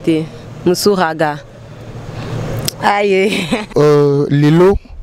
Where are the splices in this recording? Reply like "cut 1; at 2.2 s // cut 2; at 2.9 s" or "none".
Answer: cut 1; at 3.7 s